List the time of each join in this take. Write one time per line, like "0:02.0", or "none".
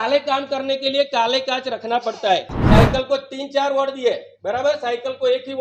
0:02.5